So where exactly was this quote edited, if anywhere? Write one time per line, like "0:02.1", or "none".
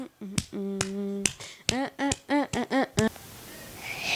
0:03.1